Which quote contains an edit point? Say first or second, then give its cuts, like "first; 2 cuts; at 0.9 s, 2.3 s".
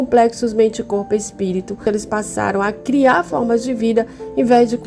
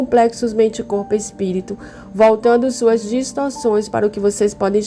first; 1 cut; at 1.8 s